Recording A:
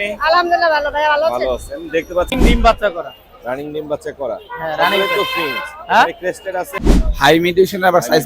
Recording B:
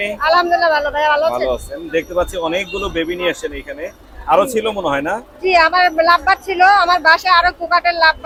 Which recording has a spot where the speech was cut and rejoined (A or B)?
A